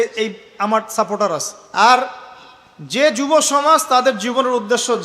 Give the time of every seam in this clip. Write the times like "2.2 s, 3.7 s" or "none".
1.6 s